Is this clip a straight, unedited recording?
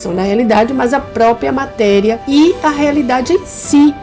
no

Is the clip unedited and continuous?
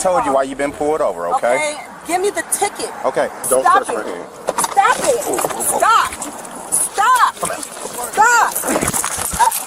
no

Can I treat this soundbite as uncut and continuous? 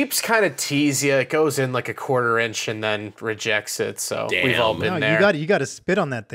yes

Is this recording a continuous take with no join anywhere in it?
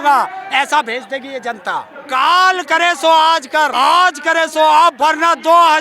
no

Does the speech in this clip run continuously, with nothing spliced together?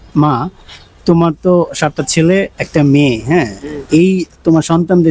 yes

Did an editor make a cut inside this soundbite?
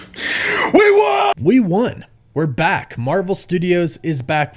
yes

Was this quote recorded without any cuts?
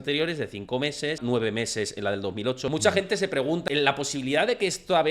no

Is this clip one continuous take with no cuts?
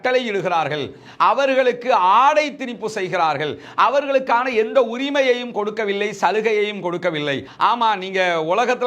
no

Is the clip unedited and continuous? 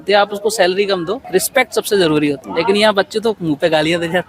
yes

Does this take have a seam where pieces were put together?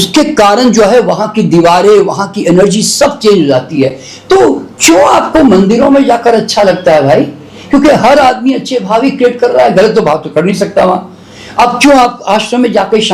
no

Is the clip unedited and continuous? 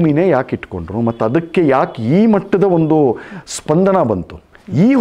yes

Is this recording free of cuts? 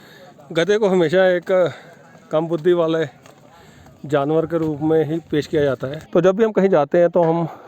no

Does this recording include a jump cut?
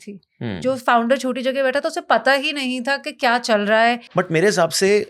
yes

